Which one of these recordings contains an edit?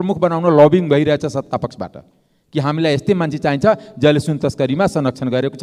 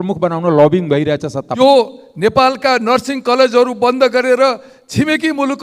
second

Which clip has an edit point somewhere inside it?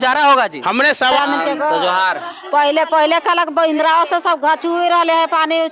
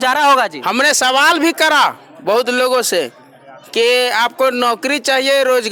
first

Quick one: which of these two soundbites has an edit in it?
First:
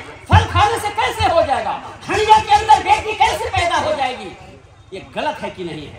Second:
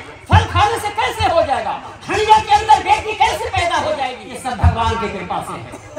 second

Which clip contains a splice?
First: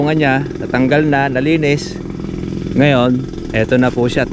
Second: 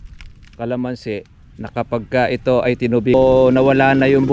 second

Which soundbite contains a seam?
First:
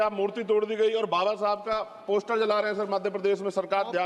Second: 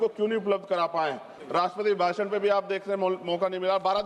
second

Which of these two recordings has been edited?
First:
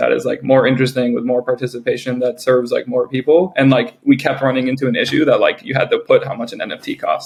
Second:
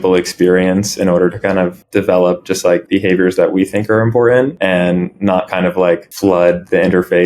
second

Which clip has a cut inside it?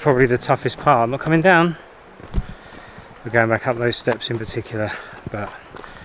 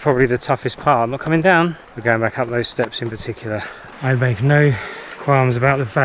second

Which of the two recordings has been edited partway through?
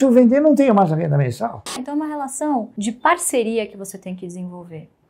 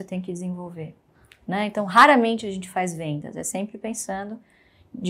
first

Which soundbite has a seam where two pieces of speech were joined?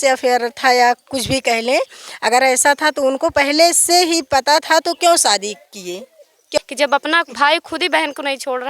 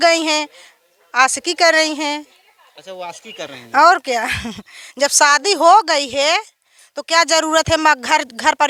first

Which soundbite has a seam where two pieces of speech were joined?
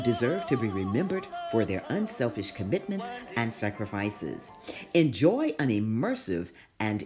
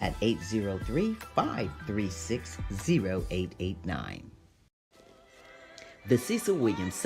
second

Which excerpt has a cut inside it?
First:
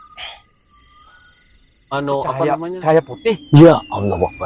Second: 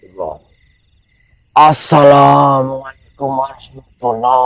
first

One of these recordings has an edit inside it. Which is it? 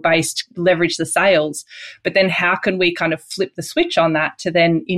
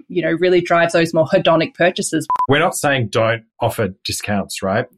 second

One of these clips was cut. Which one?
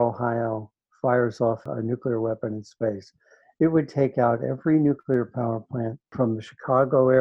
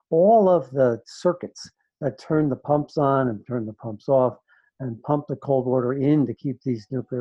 first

